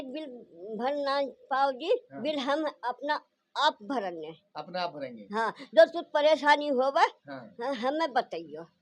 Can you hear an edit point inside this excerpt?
no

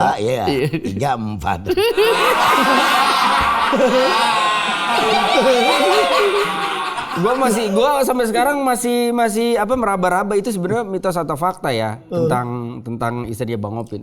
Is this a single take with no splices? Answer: yes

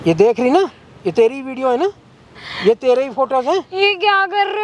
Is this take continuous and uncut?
yes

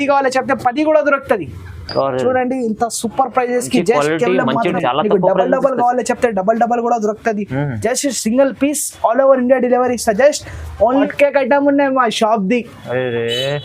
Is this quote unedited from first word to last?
no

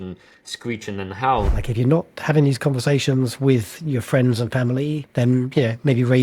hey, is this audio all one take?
no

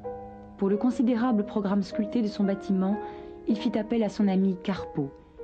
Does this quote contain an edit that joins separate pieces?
yes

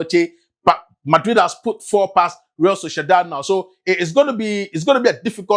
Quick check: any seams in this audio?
no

